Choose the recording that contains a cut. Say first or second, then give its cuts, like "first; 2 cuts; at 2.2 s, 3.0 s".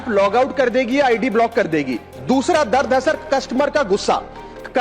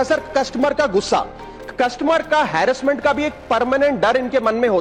first; 1 cut; at 2.1 s